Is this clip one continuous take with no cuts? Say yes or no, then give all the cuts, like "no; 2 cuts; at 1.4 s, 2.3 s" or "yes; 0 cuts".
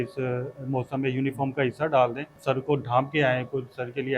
no; 1 cut; at 2.3 s